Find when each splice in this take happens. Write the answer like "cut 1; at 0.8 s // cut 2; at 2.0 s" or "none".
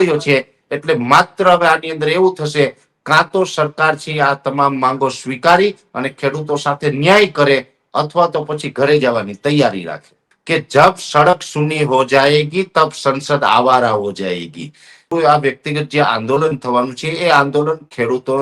cut 1; at 10.3 s // cut 2; at 15.1 s